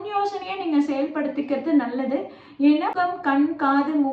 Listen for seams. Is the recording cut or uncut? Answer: cut